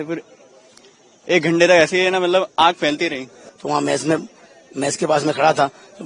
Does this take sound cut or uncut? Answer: cut